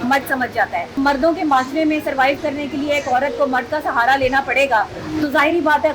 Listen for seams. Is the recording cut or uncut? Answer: cut